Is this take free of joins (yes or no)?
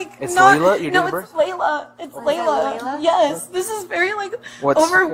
yes